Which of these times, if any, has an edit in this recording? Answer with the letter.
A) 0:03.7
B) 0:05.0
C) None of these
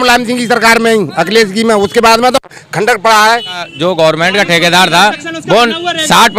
A